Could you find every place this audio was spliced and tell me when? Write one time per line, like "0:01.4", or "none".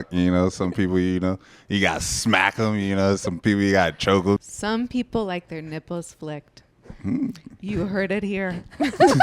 0:04.4

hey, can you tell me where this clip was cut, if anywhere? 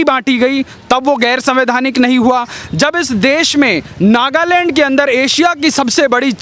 0:02.6

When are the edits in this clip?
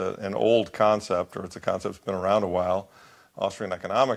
none

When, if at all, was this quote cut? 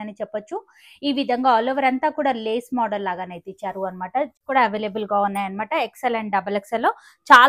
0:04.4

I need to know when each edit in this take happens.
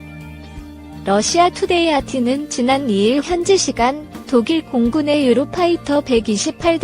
0:01.0

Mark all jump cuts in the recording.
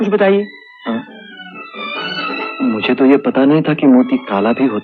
none

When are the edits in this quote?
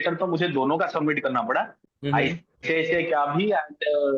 none

